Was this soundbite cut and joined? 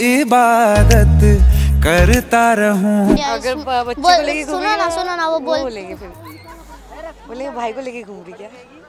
yes; 1 cut; at 3.1 s

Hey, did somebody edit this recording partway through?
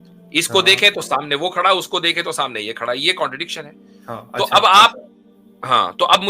no; 0 cuts

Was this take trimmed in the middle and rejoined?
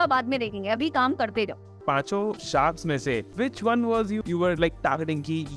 yes; 3 cuts; at 2.0 s, 3.3 s, 4.2 s

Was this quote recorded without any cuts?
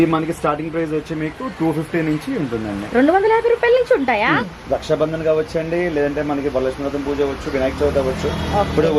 no; 1 cut; at 4.5 s

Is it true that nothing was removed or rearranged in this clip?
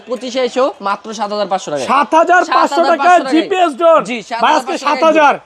yes; 0 cuts

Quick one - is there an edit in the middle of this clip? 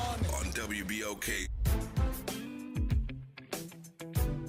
no; 0 cuts

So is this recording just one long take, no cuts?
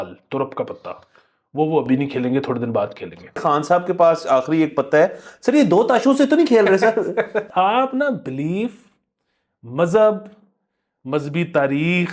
no; 2 cuts; at 3.4 s, 7.4 s

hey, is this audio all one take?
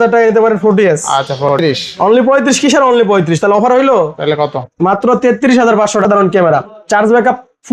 no; 2 cuts; at 1.6 s, 6.1 s

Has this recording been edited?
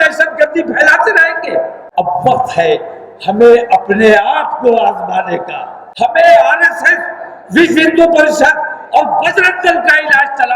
yes; 2 cuts; at 1.8 s, 5.8 s

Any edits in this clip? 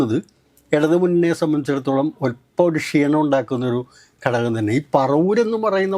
no; 0 cuts

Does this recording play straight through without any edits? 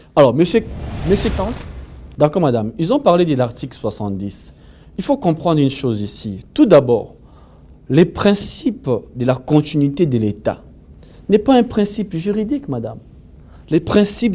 no; 1 cut; at 1.3 s

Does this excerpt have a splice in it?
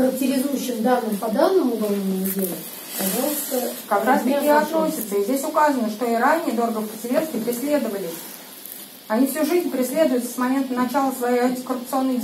no; 0 cuts

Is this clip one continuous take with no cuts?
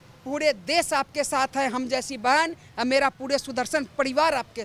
yes; 0 cuts

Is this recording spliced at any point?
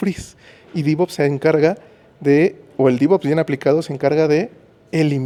no; 0 cuts

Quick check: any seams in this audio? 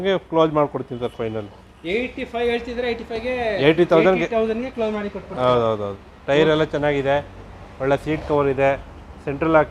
no; 0 cuts

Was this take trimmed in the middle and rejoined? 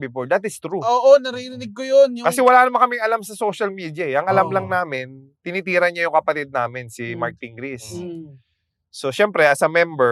no; 0 cuts

